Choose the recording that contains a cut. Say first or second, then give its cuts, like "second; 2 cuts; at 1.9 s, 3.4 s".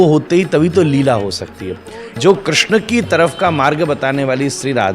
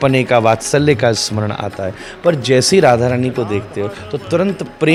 first; 1 cut; at 2.2 s